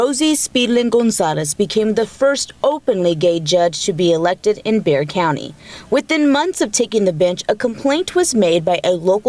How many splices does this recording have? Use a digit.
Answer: 0